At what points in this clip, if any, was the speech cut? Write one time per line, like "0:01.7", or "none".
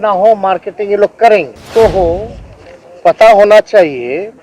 0:01.6